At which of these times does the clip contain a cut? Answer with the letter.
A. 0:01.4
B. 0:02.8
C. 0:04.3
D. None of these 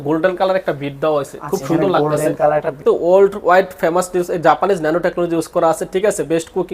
B